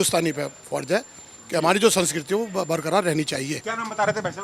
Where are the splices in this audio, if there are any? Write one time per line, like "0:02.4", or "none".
none